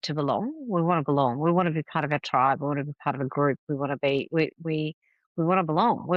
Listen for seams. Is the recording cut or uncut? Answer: uncut